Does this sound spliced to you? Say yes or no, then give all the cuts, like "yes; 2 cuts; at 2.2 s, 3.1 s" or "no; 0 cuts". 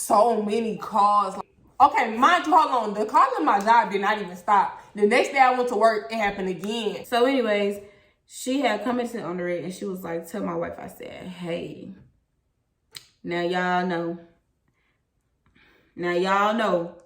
yes; 2 cuts; at 1.3 s, 7.0 s